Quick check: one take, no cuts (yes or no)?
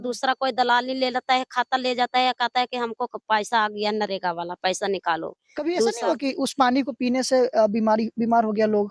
no